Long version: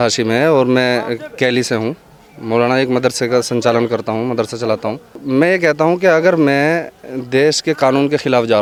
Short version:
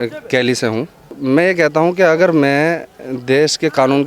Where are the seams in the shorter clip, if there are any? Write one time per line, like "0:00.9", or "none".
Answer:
0:01.1